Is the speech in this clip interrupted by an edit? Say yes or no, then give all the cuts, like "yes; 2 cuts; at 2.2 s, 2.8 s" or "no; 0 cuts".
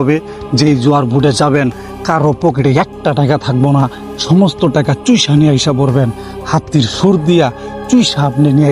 no; 0 cuts